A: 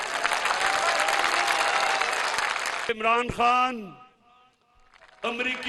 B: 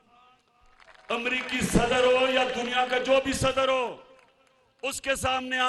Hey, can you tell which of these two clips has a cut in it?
A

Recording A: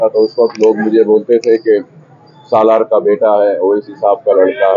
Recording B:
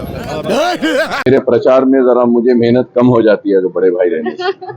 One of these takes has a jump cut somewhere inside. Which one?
B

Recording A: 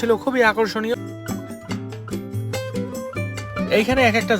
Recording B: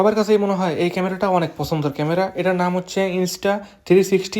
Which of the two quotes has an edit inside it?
A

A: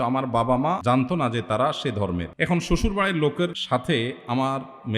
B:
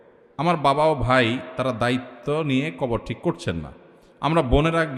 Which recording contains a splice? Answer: A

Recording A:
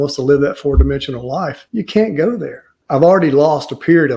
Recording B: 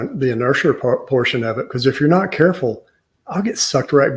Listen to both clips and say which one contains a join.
A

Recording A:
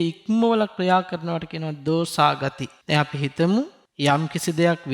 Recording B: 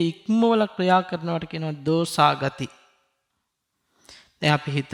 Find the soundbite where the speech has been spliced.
A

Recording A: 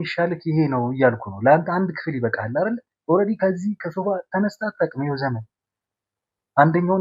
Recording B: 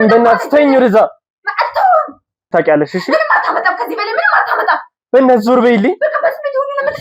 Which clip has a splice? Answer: B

